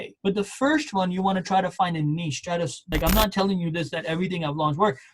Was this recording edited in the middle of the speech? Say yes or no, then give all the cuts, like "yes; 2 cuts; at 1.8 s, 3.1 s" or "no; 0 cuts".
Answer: yes; 1 cut; at 2.8 s